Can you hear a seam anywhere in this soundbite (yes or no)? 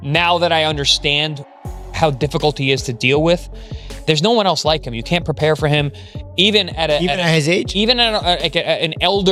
no